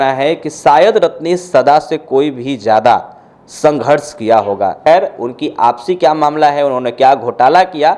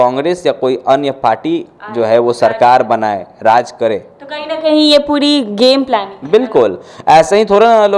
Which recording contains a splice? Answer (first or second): first